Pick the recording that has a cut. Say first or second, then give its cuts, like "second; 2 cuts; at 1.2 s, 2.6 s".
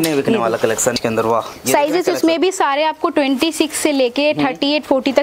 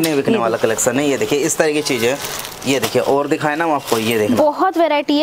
first; 1 cut; at 1.0 s